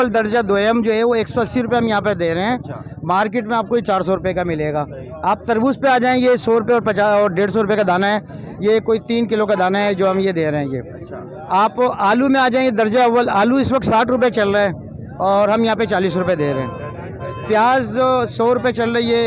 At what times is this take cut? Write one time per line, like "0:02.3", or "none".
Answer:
none